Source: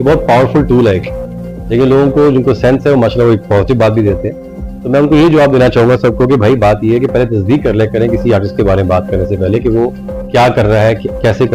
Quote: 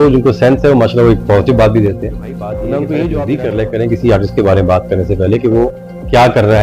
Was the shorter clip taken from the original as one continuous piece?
no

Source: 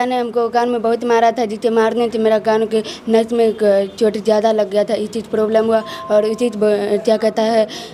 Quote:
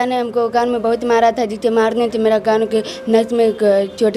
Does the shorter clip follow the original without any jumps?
yes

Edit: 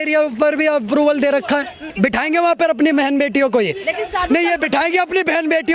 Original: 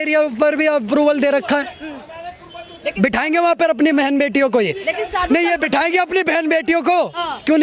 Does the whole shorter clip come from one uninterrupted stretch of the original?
no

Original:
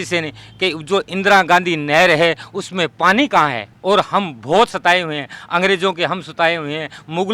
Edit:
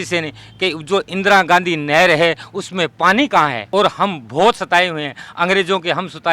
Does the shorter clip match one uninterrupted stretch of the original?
no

